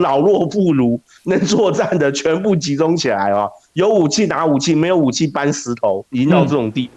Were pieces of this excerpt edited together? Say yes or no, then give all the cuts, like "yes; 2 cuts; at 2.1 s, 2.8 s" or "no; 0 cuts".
no; 0 cuts